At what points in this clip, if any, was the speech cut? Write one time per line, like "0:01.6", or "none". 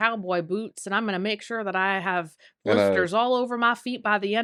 none